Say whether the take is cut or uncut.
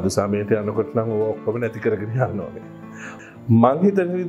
cut